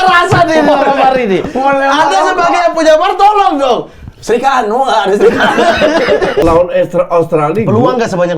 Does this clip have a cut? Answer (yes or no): yes